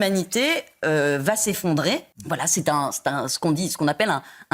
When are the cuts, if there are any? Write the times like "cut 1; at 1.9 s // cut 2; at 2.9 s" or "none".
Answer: cut 1; at 2.1 s